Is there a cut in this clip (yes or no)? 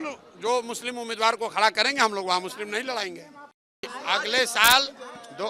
yes